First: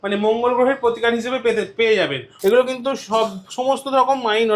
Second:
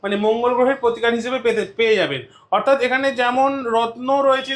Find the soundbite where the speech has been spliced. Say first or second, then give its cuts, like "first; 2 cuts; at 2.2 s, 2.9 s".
first; 1 cut; at 2.2 s